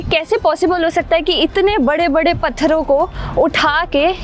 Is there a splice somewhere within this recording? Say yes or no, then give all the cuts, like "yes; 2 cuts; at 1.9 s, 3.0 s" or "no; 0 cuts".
no; 0 cuts